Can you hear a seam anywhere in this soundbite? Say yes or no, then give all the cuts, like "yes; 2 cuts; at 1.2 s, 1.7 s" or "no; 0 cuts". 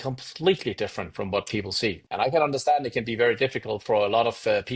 yes; 1 cut; at 2.0 s